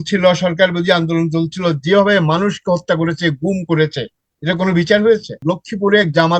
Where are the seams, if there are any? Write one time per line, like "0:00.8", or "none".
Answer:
0:05.4